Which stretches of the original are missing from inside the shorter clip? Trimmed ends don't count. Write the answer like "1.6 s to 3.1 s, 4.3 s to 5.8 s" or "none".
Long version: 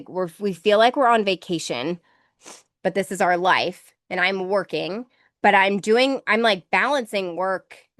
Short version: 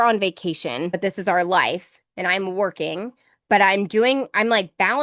2.0 s to 2.9 s

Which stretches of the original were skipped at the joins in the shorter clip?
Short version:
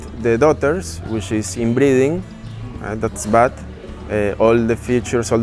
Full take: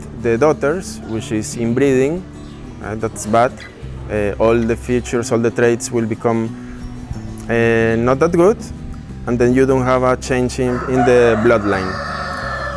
none

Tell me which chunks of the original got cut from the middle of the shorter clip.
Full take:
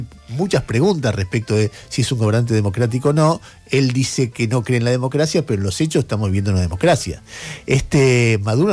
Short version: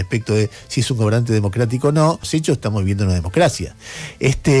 3.4 s to 5.7 s

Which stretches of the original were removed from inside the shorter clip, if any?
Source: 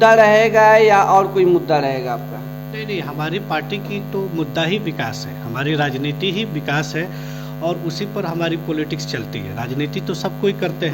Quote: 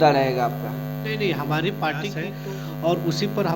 4.0 s to 7.1 s

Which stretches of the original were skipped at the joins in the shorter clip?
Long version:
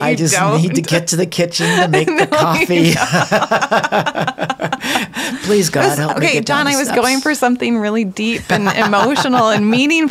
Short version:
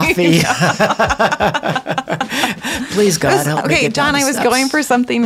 none

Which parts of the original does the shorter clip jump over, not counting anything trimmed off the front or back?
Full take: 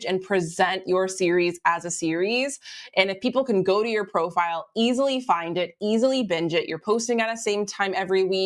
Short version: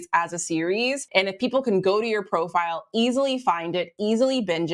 2.6 s to 2.9 s

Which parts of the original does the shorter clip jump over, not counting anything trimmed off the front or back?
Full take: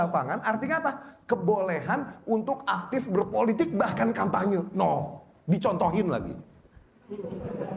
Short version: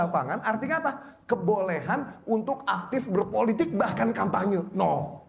none

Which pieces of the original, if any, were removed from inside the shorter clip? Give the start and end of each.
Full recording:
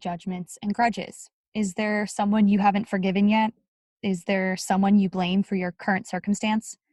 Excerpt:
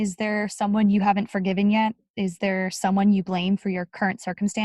3.6 s to 3.9 s

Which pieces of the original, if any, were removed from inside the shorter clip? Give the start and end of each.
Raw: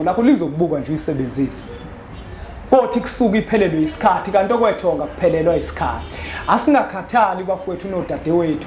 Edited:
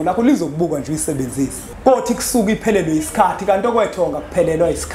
1.6 s to 2.5 s

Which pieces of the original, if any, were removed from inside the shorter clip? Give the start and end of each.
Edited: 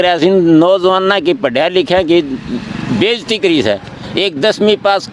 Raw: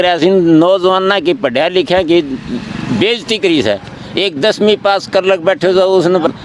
none

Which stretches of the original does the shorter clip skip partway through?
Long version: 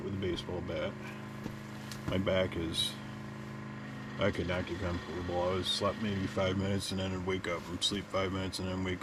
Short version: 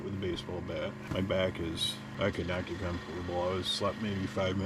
1.0 s to 2.0 s, 3.0 s to 4.0 s

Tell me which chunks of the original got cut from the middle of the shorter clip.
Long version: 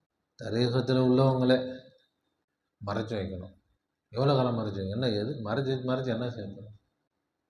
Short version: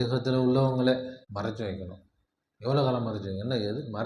1.8 s to 2.7 s

